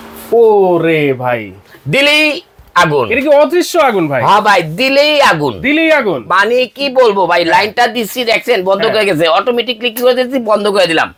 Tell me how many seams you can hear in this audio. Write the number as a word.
zero